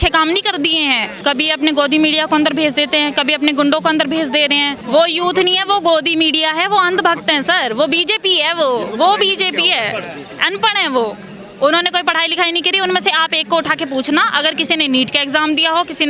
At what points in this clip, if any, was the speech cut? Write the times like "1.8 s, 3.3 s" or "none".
1.2 s, 4.8 s